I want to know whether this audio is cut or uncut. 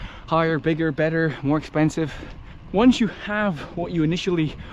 cut